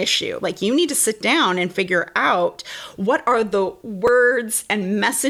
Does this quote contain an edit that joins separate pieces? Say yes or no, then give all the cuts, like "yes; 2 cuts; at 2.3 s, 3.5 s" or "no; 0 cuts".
no; 0 cuts